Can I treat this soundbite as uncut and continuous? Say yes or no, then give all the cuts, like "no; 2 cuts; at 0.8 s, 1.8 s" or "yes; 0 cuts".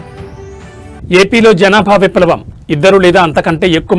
no; 1 cut; at 1.0 s